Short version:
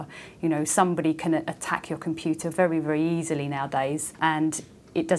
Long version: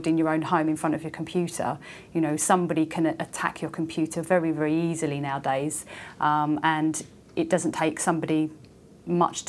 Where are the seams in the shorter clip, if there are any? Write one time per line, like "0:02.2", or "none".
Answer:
0:04.2

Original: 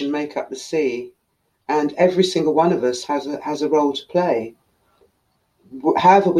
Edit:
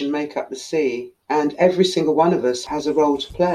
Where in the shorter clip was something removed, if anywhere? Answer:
0:01.1
0:02.6

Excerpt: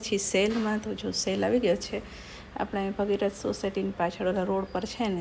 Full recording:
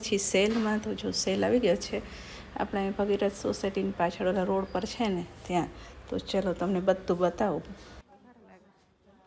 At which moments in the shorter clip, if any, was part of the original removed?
none

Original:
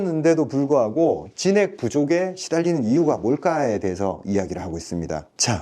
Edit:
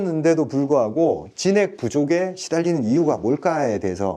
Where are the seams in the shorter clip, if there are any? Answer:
none

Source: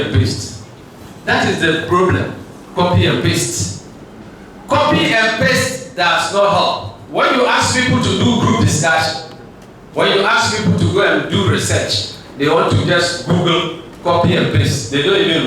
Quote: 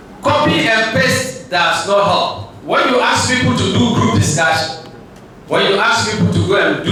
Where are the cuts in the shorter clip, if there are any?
none

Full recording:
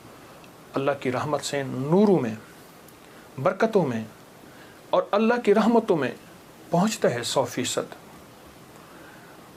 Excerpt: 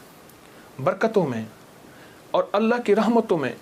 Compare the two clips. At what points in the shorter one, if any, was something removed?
none

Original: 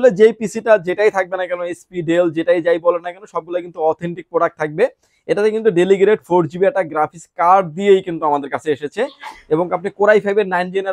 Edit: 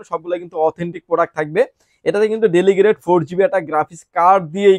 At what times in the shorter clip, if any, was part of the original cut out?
none

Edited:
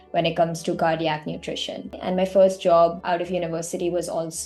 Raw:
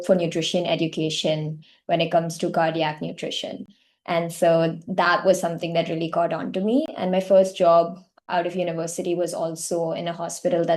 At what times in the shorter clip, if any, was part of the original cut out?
0:02.0
0:03.0

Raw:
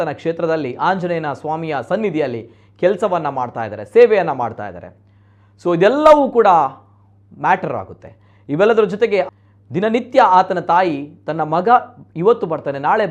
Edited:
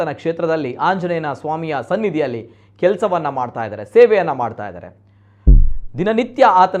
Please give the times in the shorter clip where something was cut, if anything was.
0:05.6

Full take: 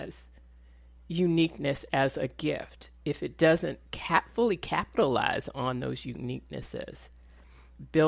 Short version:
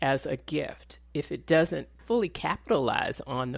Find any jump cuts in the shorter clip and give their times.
0:02.0

